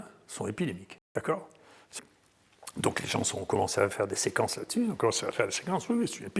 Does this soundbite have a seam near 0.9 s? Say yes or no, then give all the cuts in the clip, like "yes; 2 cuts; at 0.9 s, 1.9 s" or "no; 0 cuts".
yes; 2 cuts; at 0.9 s, 1.8 s